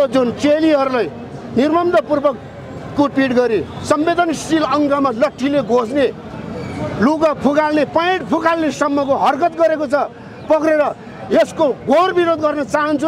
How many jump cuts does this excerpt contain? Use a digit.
0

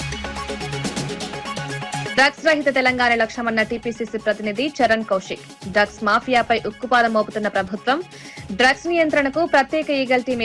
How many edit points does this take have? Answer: 1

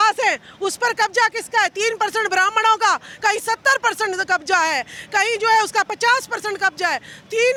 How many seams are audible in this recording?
0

